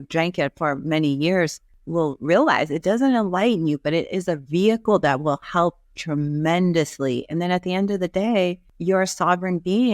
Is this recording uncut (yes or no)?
no